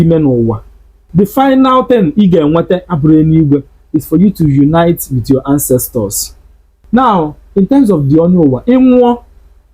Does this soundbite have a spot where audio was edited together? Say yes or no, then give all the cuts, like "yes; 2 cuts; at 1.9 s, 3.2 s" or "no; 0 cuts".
yes; 2 cuts; at 1.0 s, 6.8 s